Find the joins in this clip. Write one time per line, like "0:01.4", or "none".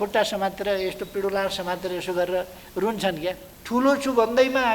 0:03.5